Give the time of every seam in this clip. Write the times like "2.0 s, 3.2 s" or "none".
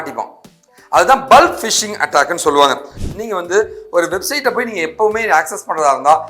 2.9 s